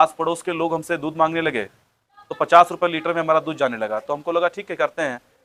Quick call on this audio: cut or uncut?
uncut